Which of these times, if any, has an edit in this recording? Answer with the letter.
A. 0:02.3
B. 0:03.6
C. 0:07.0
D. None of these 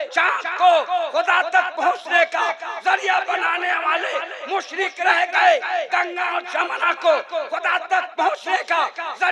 D